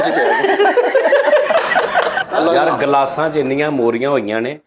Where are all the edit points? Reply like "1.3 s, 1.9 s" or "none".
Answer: 2.1 s